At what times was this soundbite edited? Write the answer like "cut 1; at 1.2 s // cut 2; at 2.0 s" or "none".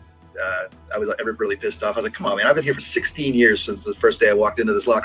none